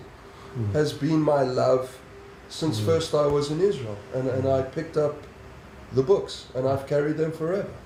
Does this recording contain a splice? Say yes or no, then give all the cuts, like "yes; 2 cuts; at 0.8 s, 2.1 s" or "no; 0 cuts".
no; 0 cuts